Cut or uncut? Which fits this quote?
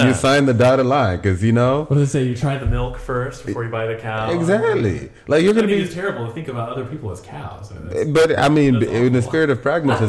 uncut